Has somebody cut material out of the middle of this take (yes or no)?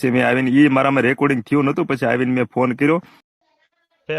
yes